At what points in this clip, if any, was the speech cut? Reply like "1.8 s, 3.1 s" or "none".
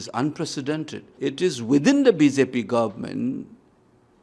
1.0 s